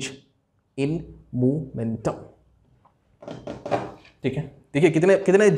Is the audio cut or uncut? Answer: uncut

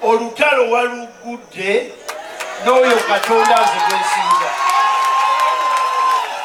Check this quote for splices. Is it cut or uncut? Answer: uncut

